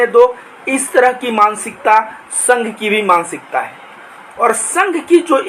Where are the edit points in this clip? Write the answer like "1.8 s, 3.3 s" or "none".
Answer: none